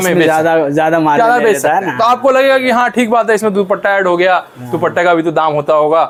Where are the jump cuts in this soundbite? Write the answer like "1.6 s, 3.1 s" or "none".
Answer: none